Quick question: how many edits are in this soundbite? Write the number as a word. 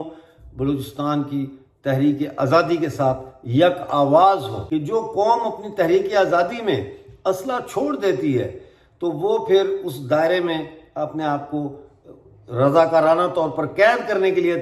one